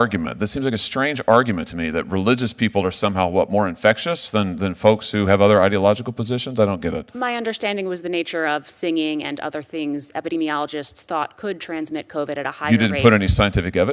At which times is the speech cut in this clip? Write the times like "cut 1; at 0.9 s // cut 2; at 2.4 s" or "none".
none